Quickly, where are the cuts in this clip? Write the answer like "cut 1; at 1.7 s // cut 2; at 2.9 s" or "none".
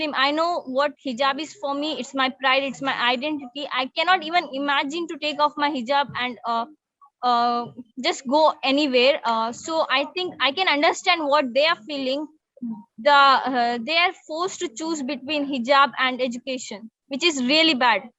none